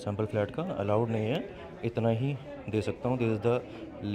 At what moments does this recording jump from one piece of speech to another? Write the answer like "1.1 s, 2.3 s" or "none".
none